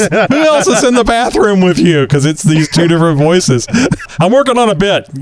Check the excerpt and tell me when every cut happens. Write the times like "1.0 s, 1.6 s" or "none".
4.1 s